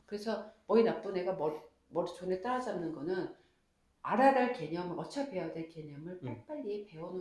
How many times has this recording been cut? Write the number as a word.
zero